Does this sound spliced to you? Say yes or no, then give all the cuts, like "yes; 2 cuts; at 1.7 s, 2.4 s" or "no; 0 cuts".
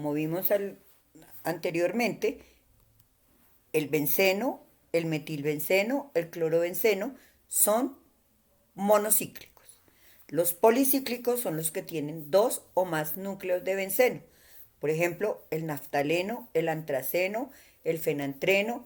no; 0 cuts